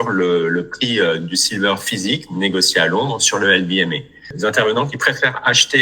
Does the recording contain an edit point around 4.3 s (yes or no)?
yes